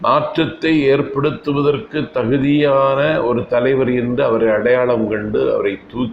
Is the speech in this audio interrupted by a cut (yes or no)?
no